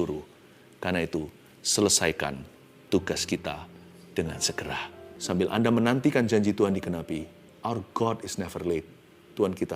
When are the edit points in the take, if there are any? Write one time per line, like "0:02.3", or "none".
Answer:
0:05.1
0:07.4